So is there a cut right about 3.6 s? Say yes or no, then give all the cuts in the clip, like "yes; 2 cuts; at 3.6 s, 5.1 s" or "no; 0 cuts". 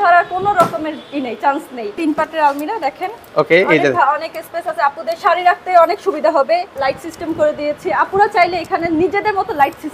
no; 2 cuts; at 2.0 s, 6.7 s